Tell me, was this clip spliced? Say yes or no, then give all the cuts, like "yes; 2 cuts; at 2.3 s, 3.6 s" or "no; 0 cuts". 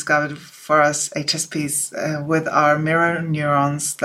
no; 0 cuts